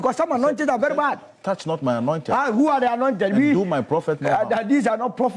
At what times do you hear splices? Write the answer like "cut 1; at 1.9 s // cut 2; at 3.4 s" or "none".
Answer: none